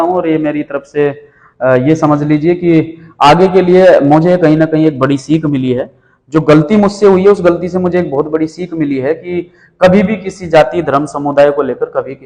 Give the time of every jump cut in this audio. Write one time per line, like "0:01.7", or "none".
none